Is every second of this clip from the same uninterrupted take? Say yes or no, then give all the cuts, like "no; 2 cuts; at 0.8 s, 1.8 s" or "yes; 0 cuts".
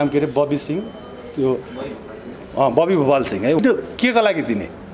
no; 1 cut; at 3.6 s